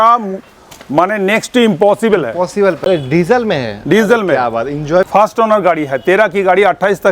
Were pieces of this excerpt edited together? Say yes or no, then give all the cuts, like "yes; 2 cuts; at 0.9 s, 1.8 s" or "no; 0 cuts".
yes; 2 cuts; at 2.8 s, 5.1 s